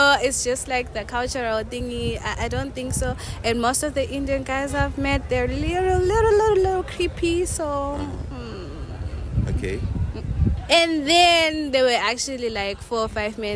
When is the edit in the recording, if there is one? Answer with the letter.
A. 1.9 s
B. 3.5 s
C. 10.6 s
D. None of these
C